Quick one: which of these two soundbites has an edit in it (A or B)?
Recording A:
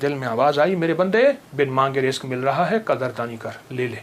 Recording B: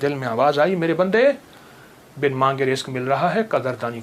A